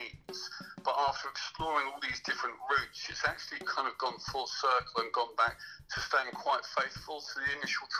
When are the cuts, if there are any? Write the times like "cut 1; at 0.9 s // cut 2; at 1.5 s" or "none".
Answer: none